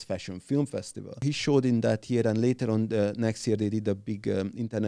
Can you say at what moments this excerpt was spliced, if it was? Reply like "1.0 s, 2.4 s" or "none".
1.2 s